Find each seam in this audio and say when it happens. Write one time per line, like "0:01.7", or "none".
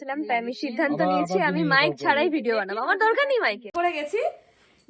0:03.7